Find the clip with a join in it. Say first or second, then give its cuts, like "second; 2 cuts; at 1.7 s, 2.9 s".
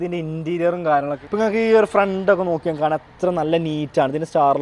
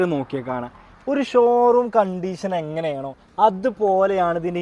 first; 1 cut; at 1.2 s